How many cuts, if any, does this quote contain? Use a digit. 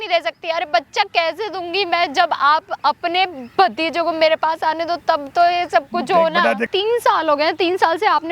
1